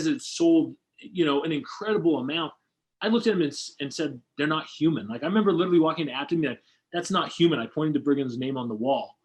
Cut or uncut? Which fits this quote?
uncut